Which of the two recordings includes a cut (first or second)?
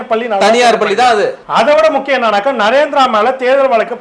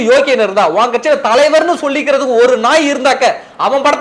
first